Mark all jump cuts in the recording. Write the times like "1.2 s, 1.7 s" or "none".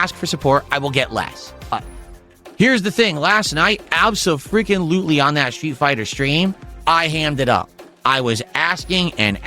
1.7 s